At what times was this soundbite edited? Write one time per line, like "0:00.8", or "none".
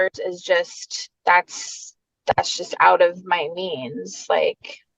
none

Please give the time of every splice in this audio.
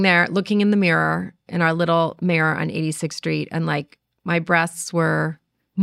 none

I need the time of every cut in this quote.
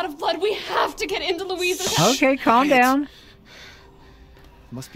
none

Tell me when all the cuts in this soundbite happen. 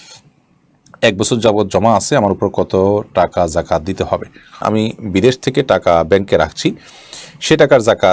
0:04.6

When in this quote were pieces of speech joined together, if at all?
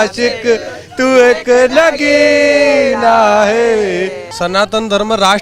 0:04.2

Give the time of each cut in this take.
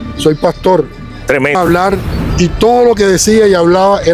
0:01.6

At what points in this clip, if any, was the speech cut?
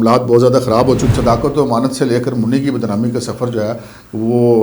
0:01.1

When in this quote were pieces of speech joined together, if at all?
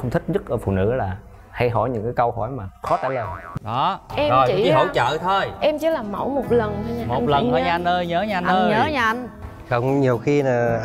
0:03.4

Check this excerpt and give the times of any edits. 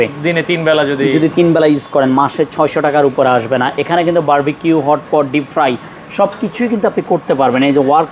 none

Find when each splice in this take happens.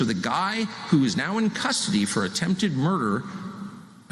none

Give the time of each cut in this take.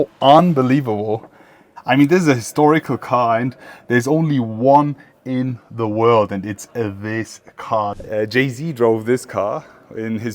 0:01.7
0:08.0

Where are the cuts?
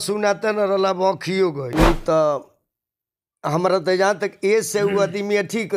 0:01.7

